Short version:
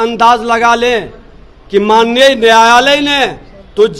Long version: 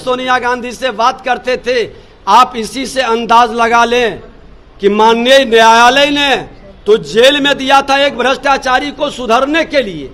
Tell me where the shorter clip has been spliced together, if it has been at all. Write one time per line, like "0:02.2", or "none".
none